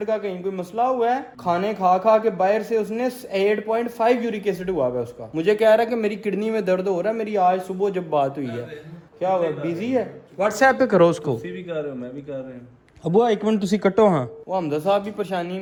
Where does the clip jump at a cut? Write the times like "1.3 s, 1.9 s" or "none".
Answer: none